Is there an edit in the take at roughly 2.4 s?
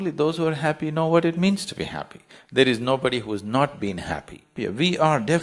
no; 1 cut; at 4.4 s

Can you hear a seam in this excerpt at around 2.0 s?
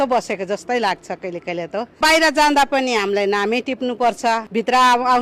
yes; 2 cuts; at 2.0 s, 4.5 s

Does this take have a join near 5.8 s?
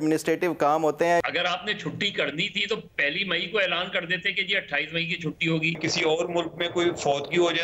yes; 2 cuts; at 1.2 s, 5.8 s

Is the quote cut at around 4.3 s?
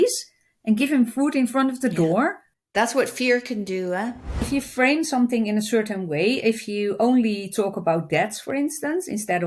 yes; 2 cuts; at 2.7 s, 4.3 s

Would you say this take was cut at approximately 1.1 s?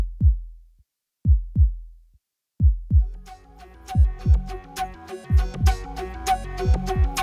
no; 1 cut; at 3.0 s

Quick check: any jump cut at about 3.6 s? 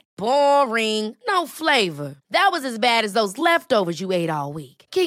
no; 0 cuts

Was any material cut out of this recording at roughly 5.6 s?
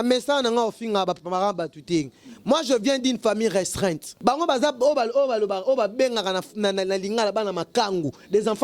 no; 1 cut; at 4.1 s

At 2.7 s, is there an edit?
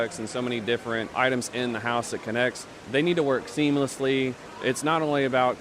yes; 3 cuts; at 1.1 s, 2.7 s, 4.4 s

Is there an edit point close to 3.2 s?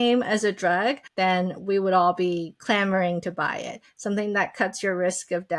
no; 1 cut; at 1.1 s

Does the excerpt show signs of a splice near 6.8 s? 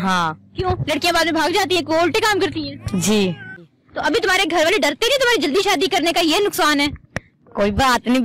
no; 1 cut; at 3.7 s

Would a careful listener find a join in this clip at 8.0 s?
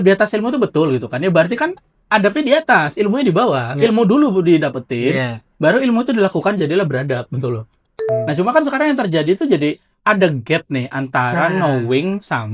yes; 1 cut; at 8.0 s

